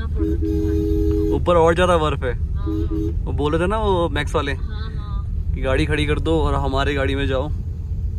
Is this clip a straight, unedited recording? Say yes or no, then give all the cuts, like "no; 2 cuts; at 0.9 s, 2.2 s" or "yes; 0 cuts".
yes; 0 cuts